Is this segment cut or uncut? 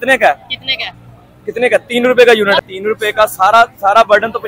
cut